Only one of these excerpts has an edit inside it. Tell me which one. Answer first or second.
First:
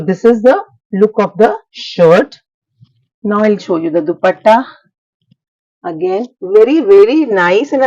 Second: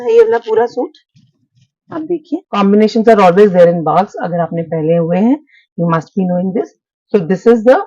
second